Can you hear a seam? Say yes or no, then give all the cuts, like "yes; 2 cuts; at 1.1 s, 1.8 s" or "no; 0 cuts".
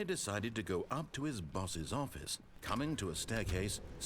yes; 1 cut; at 2.6 s